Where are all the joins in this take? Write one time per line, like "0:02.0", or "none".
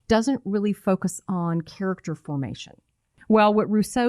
0:03.2